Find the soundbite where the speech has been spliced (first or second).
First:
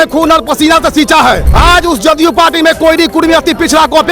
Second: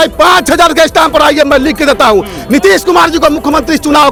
first